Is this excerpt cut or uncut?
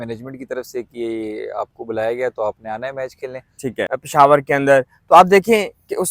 cut